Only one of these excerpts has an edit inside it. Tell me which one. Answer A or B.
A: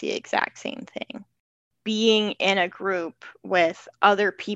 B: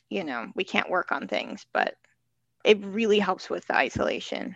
A